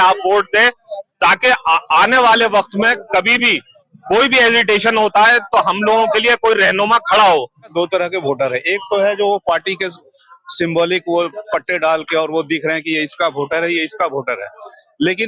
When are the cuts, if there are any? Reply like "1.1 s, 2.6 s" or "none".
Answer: 7.7 s